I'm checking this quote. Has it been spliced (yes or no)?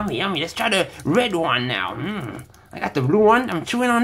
no